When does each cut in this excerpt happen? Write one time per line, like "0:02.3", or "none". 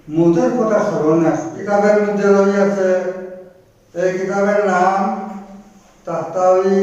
0:01.5